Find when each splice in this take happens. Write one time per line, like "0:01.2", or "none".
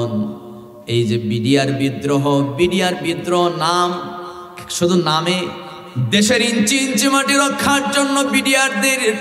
0:05.7